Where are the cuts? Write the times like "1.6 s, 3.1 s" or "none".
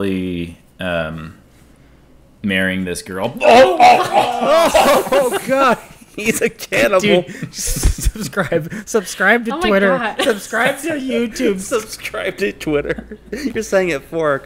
none